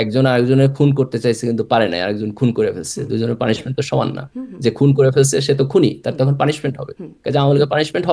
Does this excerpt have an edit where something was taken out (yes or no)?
no